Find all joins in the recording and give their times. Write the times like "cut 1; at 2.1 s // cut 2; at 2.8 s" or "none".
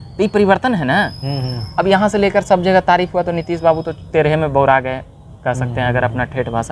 none